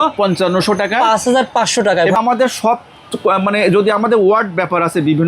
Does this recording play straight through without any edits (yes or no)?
no